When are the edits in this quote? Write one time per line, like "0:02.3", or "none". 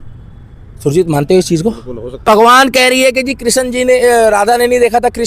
0:02.2